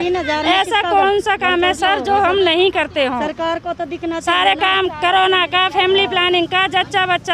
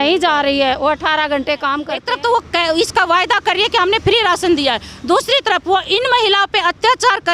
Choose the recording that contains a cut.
second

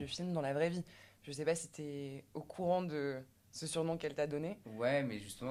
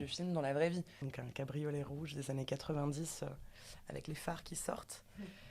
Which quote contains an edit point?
second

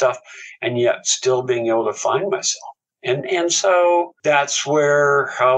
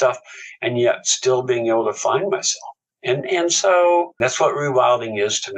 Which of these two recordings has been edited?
second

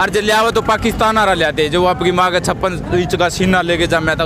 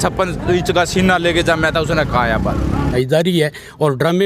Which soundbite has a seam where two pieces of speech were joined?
second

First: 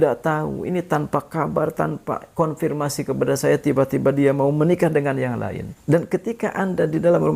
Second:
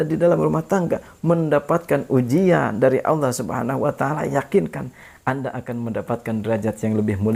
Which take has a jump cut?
first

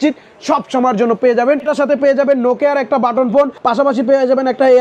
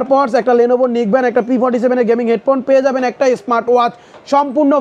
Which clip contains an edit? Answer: first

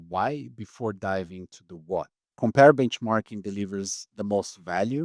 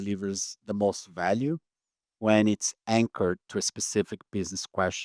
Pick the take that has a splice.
first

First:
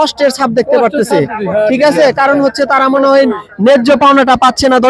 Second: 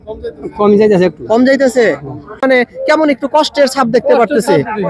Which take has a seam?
second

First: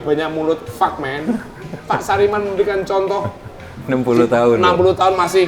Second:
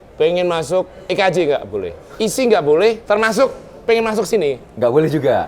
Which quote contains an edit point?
second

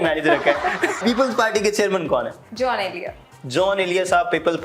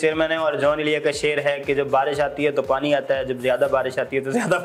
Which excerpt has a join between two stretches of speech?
first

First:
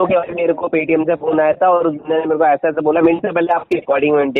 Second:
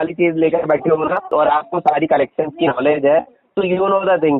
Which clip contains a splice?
second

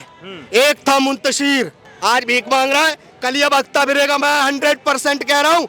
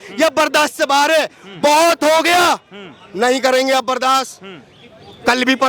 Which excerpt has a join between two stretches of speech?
first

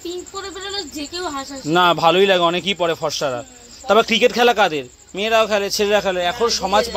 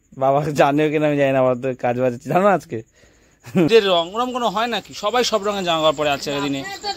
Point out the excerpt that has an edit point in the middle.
second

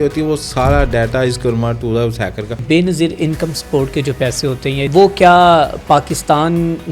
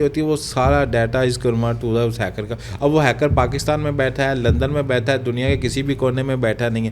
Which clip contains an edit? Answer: first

